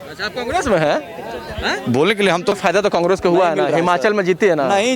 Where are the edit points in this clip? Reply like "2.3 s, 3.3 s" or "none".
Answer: 2.6 s